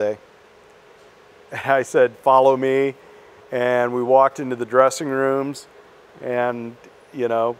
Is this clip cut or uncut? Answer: uncut